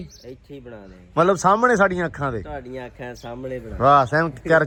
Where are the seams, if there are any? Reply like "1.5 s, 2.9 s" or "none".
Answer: none

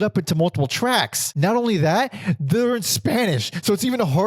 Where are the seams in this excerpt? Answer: 1.3 s

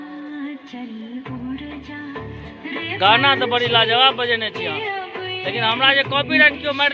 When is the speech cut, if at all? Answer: none

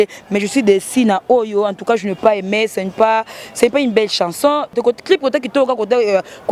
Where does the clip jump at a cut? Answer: 4.8 s

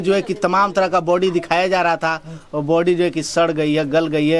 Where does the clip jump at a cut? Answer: none

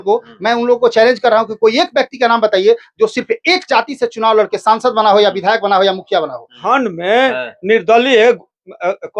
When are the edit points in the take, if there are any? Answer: 6.6 s

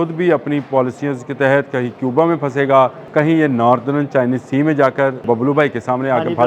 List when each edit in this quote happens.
3.0 s, 5.2 s

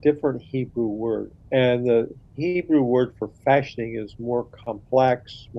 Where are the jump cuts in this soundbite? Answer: 1.3 s

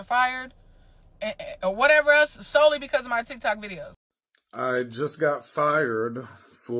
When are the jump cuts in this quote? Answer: 3.9 s

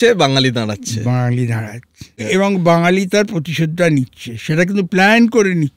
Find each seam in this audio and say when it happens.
2.2 s

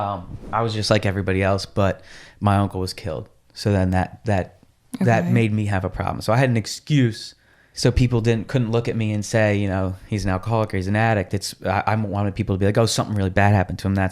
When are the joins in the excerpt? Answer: 7.6 s

